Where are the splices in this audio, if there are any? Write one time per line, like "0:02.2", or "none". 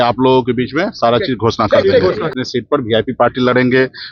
0:02.3